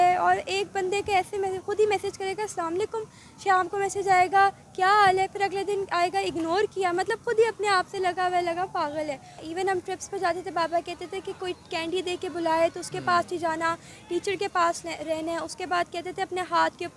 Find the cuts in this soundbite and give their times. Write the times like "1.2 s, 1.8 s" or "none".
9.4 s